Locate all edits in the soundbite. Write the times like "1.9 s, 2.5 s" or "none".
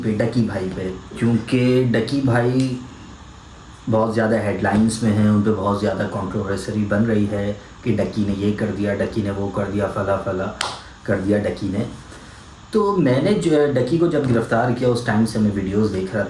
none